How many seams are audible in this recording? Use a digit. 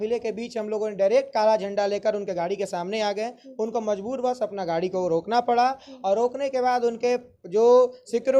0